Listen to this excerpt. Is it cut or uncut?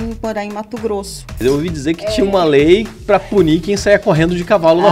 cut